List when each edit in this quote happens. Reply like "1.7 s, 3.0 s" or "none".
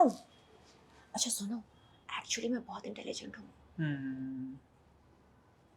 none